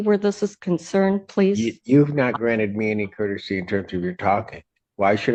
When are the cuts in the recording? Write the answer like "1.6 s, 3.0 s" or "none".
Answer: none